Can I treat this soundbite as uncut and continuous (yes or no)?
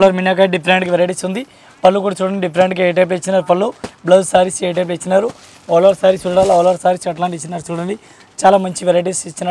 yes